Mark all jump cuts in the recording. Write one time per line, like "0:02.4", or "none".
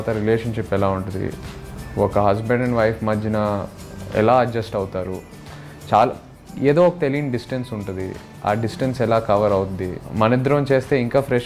0:10.0